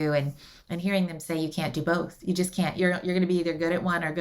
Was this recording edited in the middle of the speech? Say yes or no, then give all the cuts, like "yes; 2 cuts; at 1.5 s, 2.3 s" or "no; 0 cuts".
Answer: yes; 1 cut; at 2.8 s